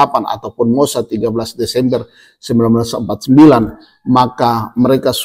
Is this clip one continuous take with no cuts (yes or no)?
yes